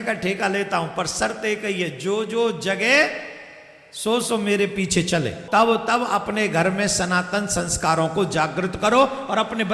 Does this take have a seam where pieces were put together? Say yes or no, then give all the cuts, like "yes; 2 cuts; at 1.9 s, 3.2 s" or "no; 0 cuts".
yes; 1 cut; at 5.4 s